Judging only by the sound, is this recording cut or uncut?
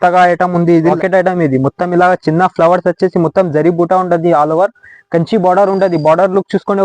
cut